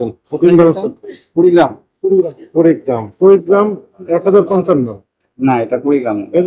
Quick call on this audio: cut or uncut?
cut